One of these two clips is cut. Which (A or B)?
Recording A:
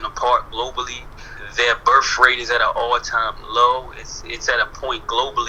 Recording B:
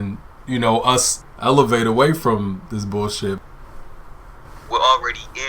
B